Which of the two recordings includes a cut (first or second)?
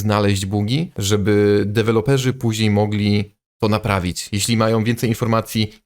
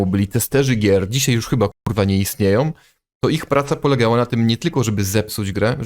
first